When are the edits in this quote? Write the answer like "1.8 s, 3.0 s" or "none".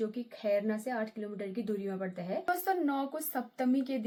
none